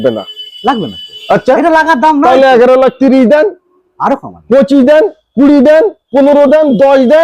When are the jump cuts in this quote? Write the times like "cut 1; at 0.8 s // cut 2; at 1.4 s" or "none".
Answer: none